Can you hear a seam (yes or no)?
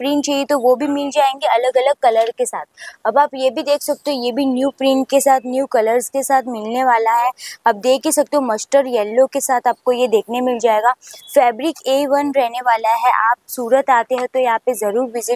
no